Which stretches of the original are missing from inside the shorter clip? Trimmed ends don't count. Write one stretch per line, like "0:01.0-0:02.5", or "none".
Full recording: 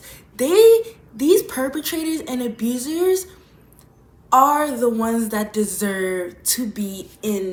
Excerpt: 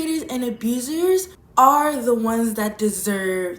0:03.4-0:04.1